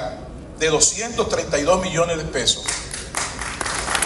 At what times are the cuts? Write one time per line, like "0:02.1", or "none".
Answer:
none

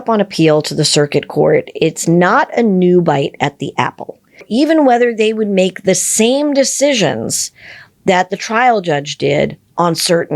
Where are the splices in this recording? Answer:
0:04.5

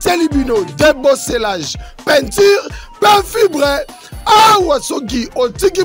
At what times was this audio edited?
none

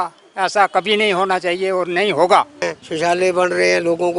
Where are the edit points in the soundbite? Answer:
0:02.6

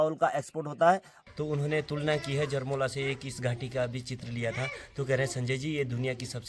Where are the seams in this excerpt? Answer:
0:01.1

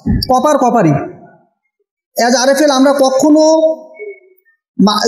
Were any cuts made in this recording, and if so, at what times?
none

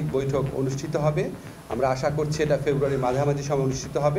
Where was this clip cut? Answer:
none

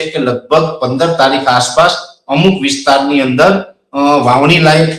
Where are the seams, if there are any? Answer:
none

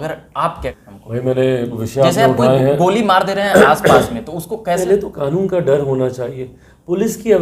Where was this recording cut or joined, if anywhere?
0:00.8
0:01.8
0:04.8

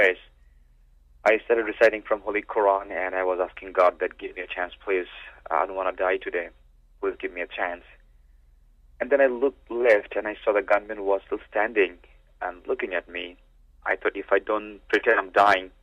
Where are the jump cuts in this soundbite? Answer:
none

